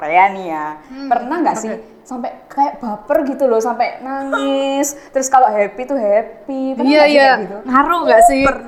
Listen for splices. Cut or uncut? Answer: uncut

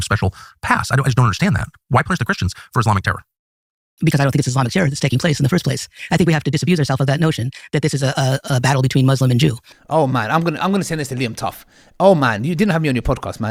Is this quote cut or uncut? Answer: uncut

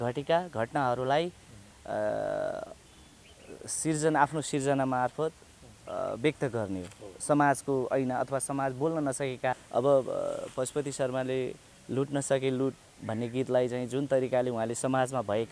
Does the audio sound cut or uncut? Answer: cut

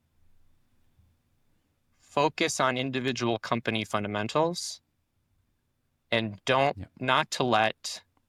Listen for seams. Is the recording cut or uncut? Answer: uncut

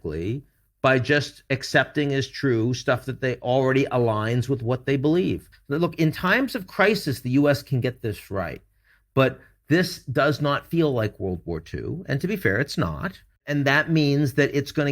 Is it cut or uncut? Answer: cut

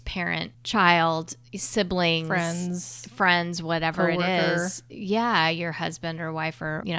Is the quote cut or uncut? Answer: uncut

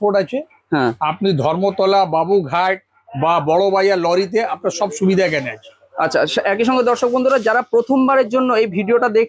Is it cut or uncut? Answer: uncut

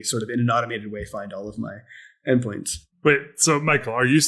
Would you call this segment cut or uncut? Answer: uncut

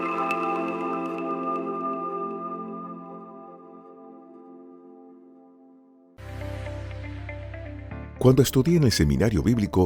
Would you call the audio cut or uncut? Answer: cut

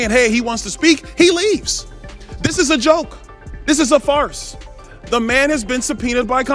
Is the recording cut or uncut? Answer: uncut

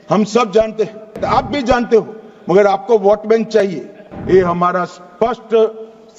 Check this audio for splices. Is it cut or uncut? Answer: cut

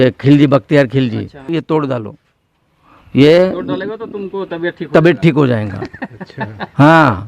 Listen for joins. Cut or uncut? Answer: cut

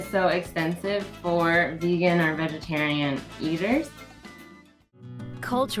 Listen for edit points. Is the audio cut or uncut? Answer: cut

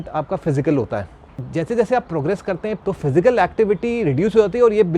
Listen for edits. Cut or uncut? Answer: cut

